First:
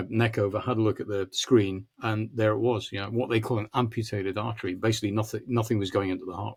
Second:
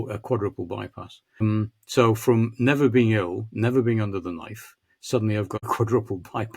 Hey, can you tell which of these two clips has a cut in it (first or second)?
second